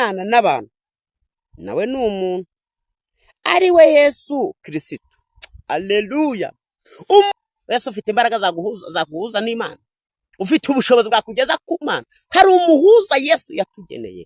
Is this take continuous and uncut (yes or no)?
no